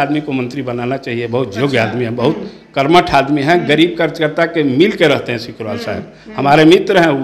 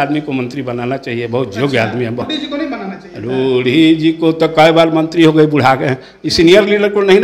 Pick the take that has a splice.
second; 1 cut; at 2.2 s

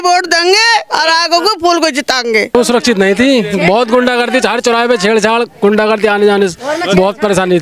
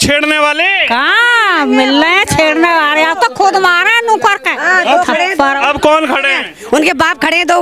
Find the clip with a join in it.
first; 1 cut; at 2.5 s

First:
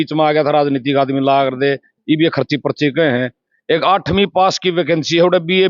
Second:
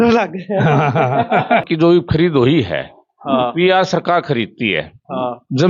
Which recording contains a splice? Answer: second; 1 cut; at 1.6 s

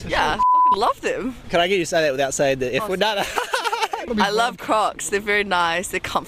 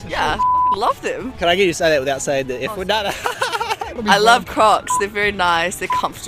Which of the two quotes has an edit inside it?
second; 1 cut; at 1.3 s

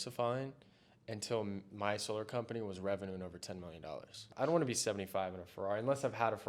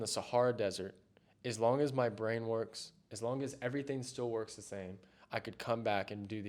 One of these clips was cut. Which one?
first; 2 cuts; at 1.7 s, 4.3 s

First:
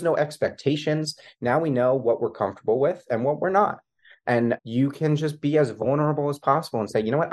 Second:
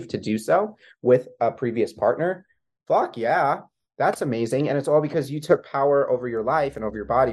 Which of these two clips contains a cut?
first; 1 cut; at 4.6 s

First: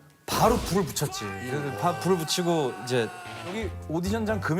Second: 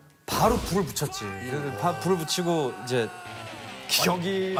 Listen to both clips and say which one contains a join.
first; 1 cut; at 3.7 s

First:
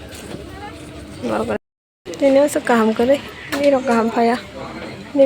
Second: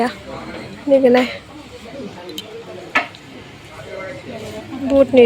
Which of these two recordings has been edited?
first; 1 cut; at 1.6 s

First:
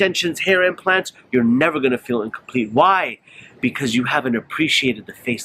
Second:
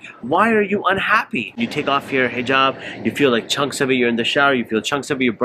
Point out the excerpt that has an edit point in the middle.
second; 1 cut; at 1.6 s

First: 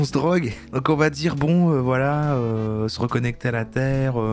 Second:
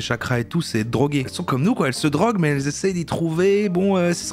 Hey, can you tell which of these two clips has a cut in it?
second; 1 cut; at 1.3 s

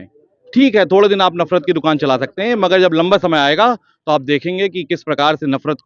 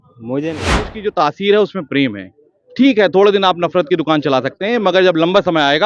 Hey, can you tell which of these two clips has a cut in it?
second; 1 cut; at 0.9 s

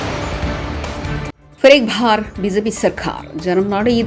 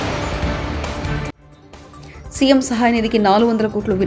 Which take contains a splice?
first; 1 cut; at 1.4 s

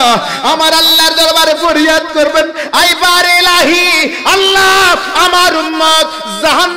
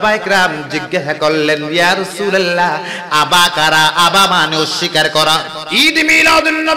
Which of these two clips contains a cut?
second; 1 cut; at 5.6 s

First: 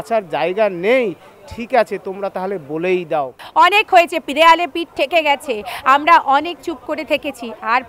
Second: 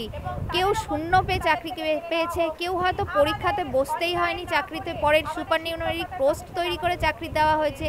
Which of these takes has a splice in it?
first; 1 cut; at 3.4 s

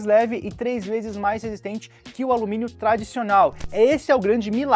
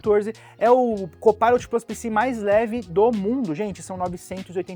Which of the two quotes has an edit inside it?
first; 1 cut; at 3.6 s

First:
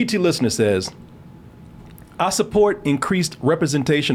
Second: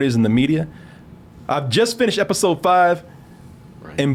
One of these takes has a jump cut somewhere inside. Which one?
second; 1 cut; at 1.3 s

